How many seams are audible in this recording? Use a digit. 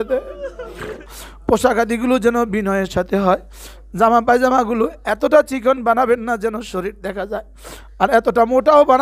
1